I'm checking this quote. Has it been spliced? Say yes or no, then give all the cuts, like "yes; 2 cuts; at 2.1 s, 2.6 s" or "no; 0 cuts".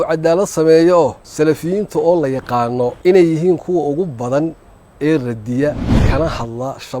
yes; 3 cuts; at 1.2 s, 3.0 s, 5.9 s